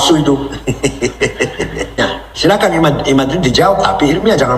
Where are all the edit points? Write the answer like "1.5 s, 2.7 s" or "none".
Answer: 2.0 s